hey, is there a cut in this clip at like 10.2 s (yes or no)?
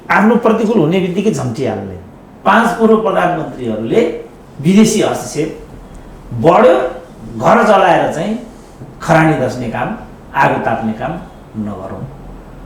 no